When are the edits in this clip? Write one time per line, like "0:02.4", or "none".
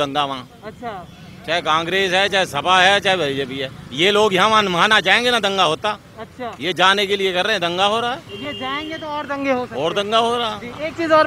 none